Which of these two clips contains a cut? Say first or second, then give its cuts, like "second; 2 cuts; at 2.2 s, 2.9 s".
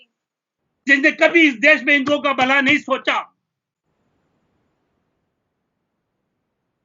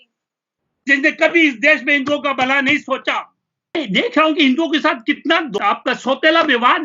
second; 1 cut; at 3.7 s